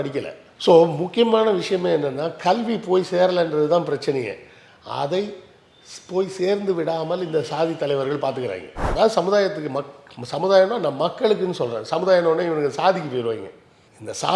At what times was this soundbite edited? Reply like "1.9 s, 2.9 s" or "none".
8.8 s